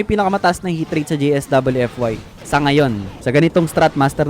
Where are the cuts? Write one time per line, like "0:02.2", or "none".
0:02.3
0:03.1